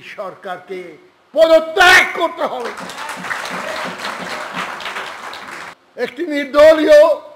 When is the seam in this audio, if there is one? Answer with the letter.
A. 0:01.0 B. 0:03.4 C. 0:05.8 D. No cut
C